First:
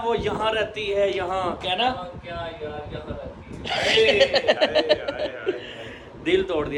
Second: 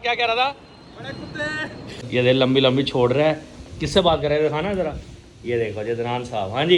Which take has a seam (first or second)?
second